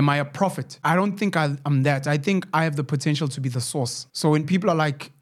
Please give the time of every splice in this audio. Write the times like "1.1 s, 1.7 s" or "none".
0.8 s, 4.0 s